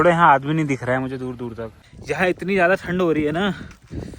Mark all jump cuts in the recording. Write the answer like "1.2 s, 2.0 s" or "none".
1.8 s